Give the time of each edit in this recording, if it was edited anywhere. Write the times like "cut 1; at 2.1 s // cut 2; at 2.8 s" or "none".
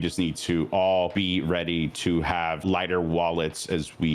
cut 1; at 1.1 s // cut 2; at 2.6 s